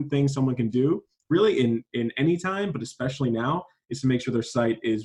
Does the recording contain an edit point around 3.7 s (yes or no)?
no